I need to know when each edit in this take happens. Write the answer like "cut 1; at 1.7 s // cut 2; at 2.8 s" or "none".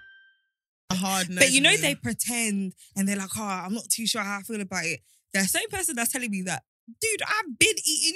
cut 1; at 0.9 s